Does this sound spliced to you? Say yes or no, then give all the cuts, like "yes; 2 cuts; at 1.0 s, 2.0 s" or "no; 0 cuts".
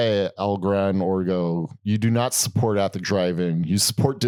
no; 0 cuts